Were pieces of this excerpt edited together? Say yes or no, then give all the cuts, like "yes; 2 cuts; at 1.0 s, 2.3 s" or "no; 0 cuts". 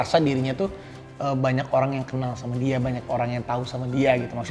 no; 0 cuts